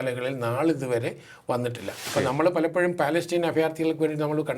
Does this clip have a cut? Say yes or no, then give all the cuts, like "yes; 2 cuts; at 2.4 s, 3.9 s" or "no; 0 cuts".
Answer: yes; 1 cut; at 2.1 s